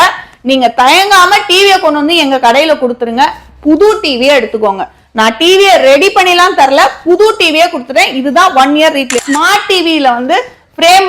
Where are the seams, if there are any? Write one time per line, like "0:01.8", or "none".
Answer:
0:09.2